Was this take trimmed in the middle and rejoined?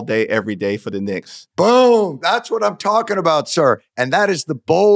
no; 0 cuts

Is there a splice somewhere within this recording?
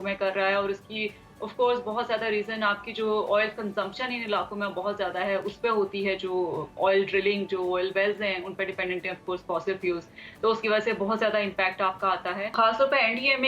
yes; 1 cut; at 12.5 s

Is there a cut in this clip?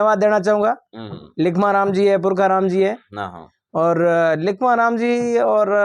no; 0 cuts

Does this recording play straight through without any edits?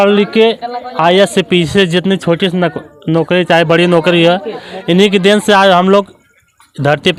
yes; 0 cuts

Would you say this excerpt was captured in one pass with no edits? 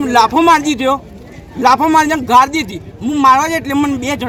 yes; 0 cuts

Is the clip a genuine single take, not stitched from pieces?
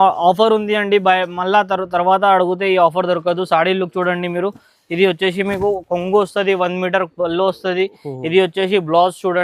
yes; 0 cuts

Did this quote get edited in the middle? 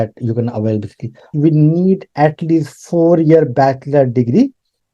yes; 1 cut; at 1.3 s

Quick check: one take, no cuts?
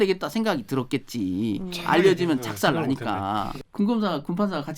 no; 1 cut; at 3.5 s

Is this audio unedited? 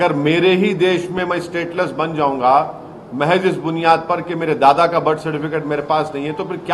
yes; 0 cuts

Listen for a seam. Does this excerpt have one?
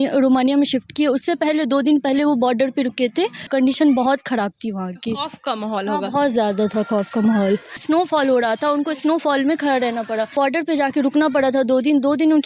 yes; 3 cuts; at 3.4 s, 7.8 s, 10.3 s

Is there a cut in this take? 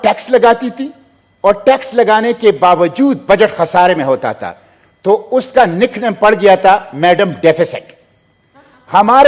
no; 0 cuts

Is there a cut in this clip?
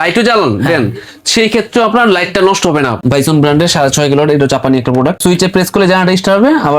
yes; 2 cuts; at 3.0 s, 5.2 s

